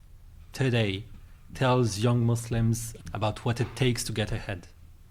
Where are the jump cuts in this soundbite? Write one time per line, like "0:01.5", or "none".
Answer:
none